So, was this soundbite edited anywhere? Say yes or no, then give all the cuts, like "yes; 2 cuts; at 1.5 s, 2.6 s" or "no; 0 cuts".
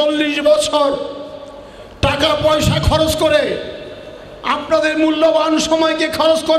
no; 0 cuts